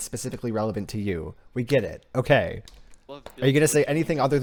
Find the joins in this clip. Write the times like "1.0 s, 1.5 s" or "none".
none